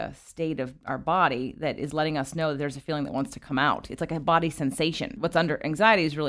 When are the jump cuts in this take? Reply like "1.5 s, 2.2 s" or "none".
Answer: 5.2 s